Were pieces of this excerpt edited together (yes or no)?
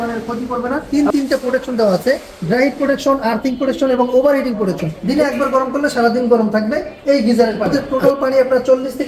yes